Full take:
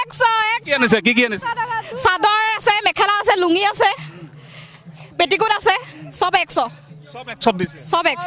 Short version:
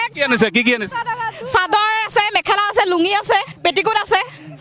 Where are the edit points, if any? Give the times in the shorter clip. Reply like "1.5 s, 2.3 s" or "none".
3.5 s